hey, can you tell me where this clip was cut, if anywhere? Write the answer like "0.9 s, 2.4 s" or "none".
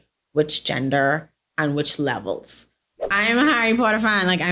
2.9 s